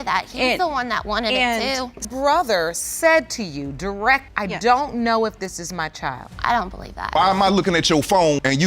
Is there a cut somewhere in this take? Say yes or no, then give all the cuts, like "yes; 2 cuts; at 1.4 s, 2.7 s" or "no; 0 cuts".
yes; 1 cut; at 7.1 s